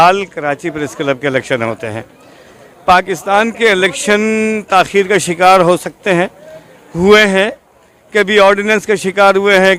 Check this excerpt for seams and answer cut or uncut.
uncut